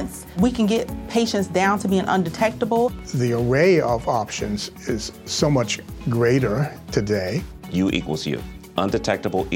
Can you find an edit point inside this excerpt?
no; 0 cuts

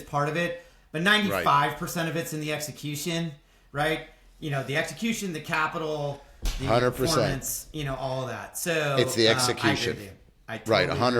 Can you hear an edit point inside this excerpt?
no; 0 cuts

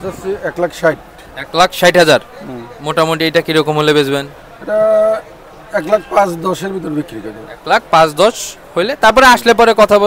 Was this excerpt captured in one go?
yes; 0 cuts

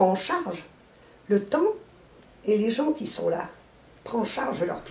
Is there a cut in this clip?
no; 0 cuts

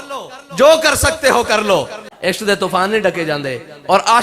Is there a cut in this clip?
yes; 1 cut; at 2.0 s

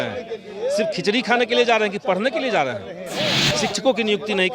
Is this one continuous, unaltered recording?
no; 1 cut; at 3.4 s

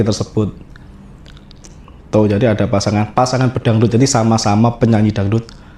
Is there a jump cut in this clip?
no; 0 cuts

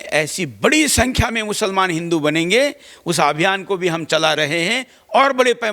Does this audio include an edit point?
no; 0 cuts

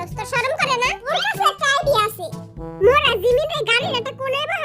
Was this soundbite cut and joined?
yes; 1 cut; at 1.1 s

